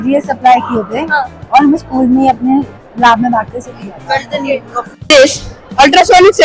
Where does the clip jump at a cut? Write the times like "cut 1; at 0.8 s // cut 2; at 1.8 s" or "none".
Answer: cut 1; at 5.1 s